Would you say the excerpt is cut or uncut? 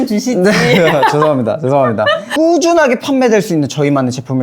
cut